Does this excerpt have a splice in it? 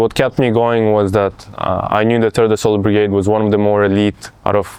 no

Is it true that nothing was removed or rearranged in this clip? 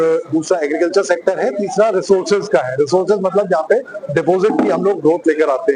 yes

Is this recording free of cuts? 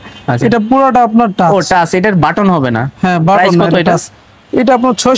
yes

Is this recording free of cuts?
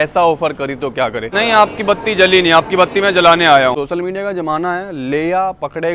no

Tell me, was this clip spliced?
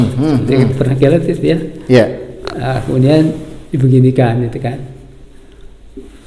no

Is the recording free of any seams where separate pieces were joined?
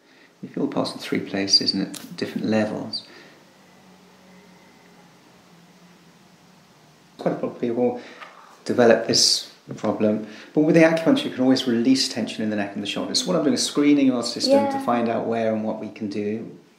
no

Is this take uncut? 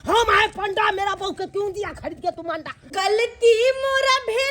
no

